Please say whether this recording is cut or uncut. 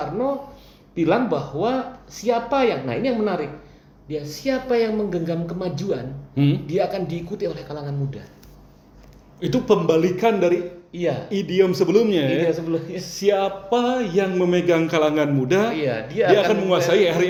uncut